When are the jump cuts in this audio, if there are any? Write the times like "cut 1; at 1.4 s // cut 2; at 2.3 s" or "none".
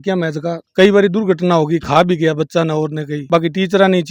none